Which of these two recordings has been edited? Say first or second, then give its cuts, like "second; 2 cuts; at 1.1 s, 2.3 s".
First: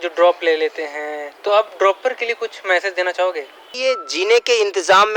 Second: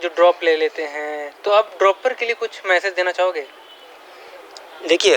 first; 1 cut; at 3.7 s